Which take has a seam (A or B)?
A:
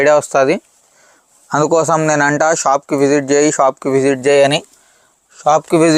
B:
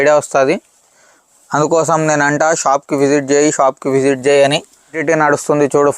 B